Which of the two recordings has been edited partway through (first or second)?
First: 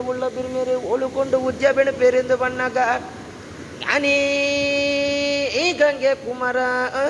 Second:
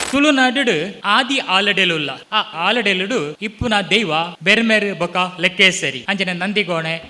second